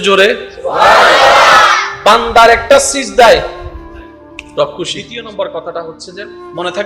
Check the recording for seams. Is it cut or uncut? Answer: cut